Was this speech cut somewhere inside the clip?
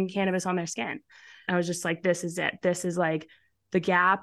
yes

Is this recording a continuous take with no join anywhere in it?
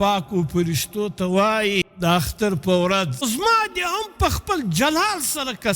no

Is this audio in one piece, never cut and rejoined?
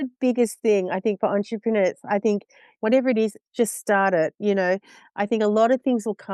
no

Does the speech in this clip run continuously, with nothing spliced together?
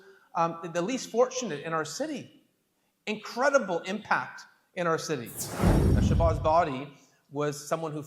no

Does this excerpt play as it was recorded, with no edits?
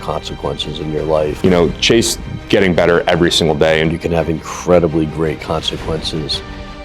no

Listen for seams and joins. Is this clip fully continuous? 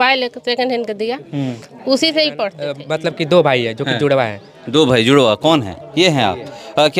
no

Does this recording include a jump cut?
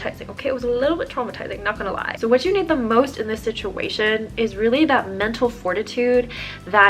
yes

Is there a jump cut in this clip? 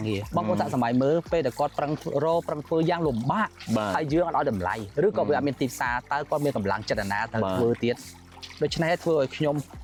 no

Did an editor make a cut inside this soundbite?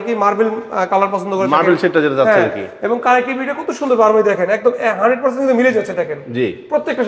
no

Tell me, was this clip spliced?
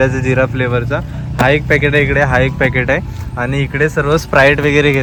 no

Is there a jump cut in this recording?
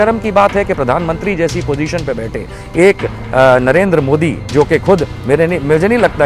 no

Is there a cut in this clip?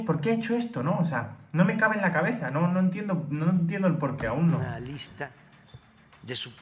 no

